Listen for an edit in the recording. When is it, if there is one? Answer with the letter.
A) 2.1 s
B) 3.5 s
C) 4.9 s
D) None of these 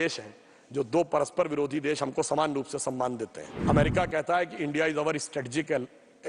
B